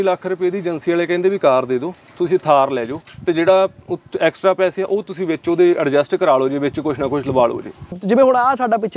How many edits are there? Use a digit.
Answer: 1